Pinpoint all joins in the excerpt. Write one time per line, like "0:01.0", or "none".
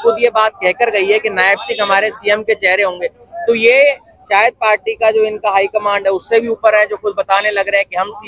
none